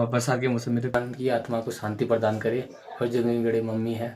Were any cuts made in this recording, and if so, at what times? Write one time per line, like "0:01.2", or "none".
0:00.9